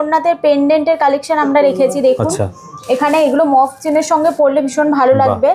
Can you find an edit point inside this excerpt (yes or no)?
no